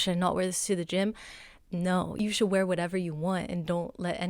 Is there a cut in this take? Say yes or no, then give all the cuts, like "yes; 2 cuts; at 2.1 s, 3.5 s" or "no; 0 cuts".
yes; 1 cut; at 2.1 s